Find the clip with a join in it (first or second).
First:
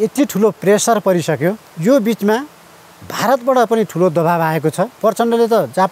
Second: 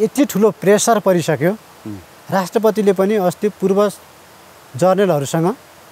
first